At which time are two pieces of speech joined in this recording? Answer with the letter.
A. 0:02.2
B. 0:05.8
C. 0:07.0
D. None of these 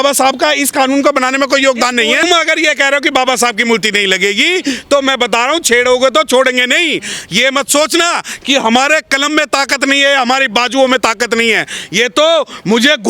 A